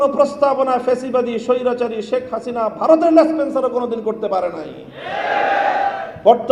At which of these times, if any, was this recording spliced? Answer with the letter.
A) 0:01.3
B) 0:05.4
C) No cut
C